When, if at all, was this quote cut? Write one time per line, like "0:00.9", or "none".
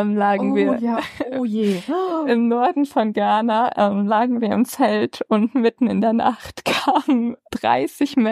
none

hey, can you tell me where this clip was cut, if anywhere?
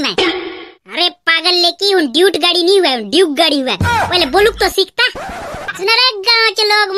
0:05.6

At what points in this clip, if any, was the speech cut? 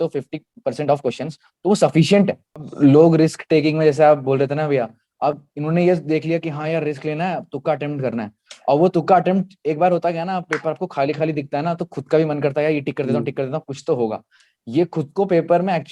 0:02.7

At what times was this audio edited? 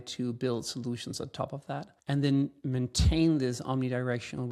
0:01.9

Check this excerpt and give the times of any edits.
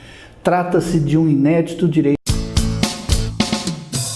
0:02.2

